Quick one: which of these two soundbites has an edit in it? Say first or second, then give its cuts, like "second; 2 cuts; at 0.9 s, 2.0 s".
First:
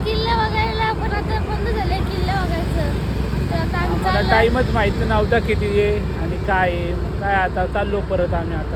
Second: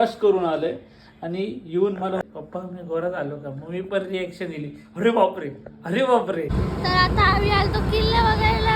second; 2 cuts; at 2.2 s, 6.5 s